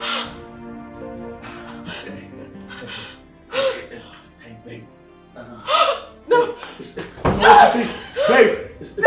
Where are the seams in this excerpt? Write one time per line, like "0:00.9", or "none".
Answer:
0:01.0

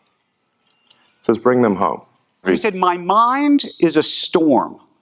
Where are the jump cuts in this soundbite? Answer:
0:02.4

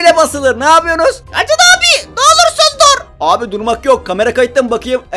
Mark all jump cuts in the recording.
0:01.3
0:03.1

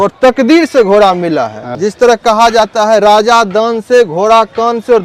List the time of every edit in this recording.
0:01.6

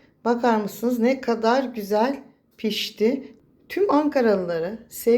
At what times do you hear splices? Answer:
0:03.3

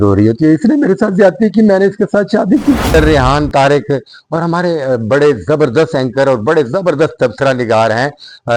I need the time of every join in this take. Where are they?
0:02.9

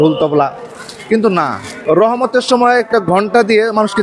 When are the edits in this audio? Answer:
0:01.7

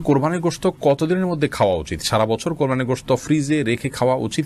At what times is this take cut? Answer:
none

